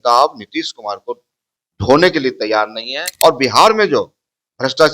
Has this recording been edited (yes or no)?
yes